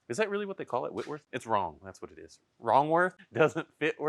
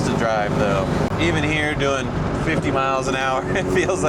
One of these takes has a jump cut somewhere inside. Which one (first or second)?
second